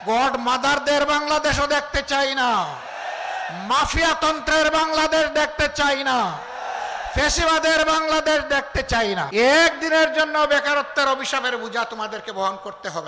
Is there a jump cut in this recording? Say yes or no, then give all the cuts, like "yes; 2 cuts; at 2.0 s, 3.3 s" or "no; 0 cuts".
yes; 1 cut; at 9.3 s